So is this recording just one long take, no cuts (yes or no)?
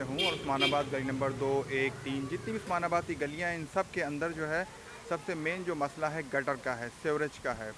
yes